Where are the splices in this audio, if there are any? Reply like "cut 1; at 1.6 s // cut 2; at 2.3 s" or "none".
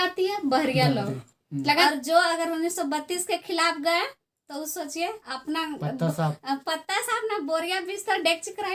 cut 1; at 1.8 s